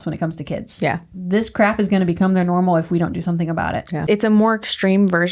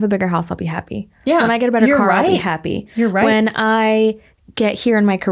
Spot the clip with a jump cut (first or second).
first